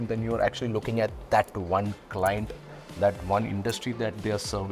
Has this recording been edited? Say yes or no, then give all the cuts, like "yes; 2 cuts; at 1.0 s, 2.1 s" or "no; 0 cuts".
no; 0 cuts